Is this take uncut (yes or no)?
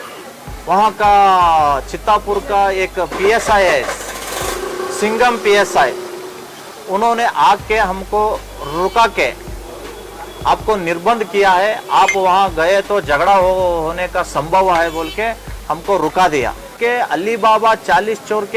no